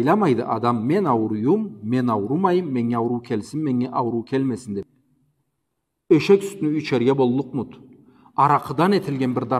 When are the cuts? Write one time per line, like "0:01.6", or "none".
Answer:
0:05.0